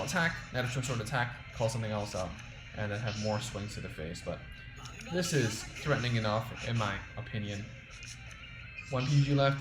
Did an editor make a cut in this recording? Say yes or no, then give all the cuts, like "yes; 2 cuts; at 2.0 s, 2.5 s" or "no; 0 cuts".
no; 0 cuts